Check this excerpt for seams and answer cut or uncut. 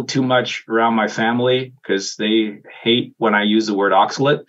uncut